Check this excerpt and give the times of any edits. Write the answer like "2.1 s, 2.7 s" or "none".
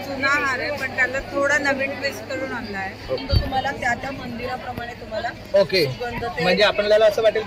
3.2 s